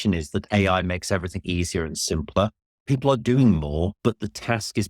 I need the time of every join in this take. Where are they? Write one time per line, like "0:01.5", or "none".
0:02.7
0:04.0